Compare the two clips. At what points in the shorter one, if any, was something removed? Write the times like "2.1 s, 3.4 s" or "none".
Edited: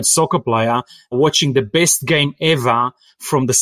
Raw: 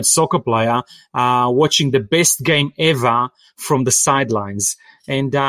1.1 s